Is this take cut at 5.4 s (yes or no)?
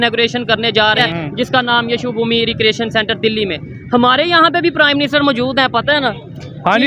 no